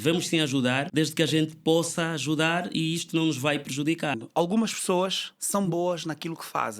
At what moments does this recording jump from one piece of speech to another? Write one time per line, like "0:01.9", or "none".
0:00.8
0:04.2